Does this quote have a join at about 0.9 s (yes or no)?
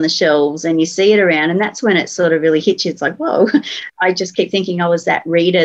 no